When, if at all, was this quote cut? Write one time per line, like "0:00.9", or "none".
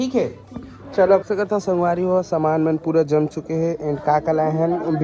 0:01.3